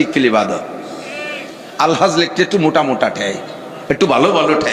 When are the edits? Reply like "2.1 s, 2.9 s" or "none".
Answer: none